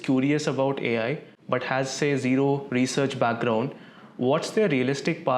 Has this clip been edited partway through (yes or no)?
no